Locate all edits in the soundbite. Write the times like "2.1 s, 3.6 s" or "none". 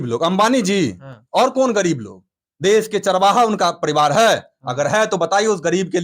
none